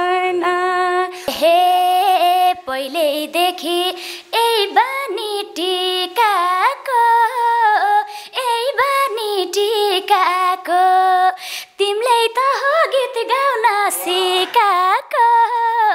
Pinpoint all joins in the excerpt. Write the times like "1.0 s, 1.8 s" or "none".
1.2 s